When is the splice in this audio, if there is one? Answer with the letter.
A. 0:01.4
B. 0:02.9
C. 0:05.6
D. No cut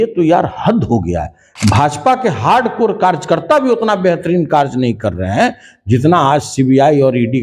A